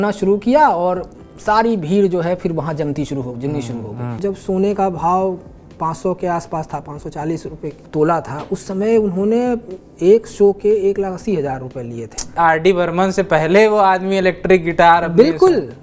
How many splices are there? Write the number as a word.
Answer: three